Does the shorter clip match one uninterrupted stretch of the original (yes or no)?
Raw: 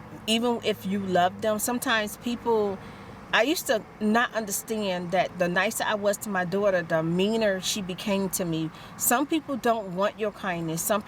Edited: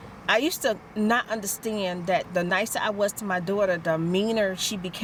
yes